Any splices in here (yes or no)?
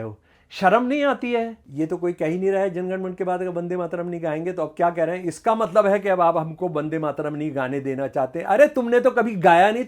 yes